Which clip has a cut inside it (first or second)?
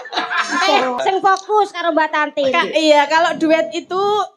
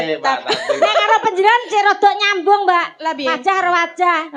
first